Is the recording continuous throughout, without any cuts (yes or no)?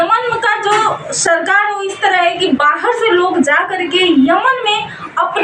yes